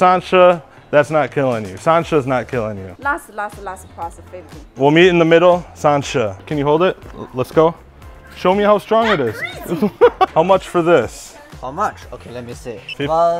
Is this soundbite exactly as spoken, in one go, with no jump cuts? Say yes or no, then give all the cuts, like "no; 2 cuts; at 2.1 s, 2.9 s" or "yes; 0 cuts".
no; 3 cuts; at 4.6 s, 6.4 s, 10.3 s